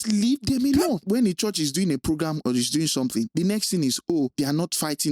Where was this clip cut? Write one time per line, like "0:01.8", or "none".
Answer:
0:01.0
0:03.3
0:04.3